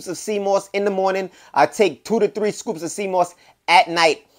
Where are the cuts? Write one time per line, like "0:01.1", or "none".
none